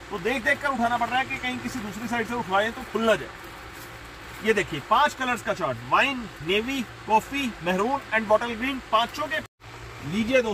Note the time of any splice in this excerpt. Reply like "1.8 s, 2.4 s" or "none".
9.4 s